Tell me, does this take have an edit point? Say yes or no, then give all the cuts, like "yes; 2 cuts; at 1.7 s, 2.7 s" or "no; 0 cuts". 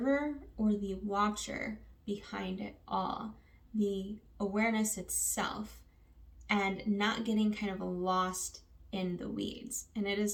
no; 0 cuts